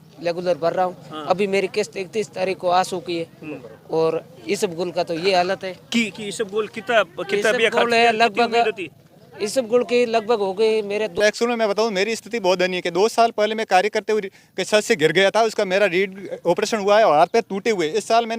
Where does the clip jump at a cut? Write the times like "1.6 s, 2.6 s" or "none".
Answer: 11.2 s

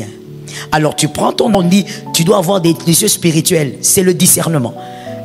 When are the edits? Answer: 1.5 s

